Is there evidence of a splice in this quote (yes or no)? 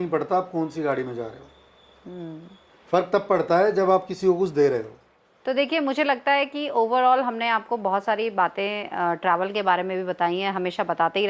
no